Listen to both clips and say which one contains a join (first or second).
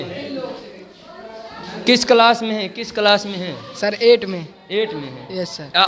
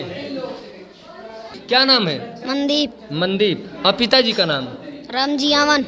second